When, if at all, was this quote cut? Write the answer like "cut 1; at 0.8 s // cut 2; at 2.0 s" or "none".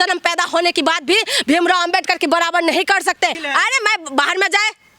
cut 1; at 3.4 s